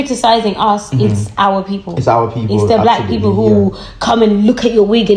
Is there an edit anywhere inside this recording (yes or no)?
no